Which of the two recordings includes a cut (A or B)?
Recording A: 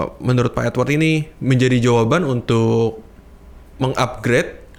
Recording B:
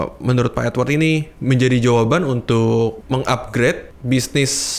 B